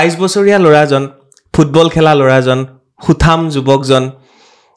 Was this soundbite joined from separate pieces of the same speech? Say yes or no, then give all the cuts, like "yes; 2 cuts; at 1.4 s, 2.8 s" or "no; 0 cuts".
no; 0 cuts